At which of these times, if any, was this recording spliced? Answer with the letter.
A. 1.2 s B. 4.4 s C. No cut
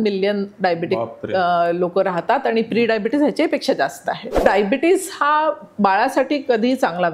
B